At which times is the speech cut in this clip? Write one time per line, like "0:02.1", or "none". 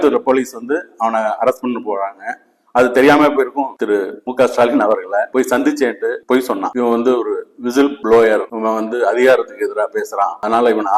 0:03.7
0:06.7